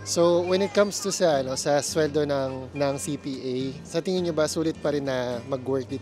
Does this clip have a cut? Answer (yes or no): no